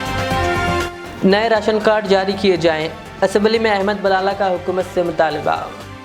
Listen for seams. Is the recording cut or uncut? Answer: cut